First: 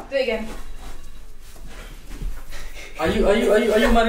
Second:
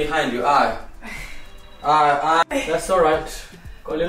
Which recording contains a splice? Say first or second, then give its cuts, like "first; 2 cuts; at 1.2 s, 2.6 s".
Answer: second; 1 cut; at 2.4 s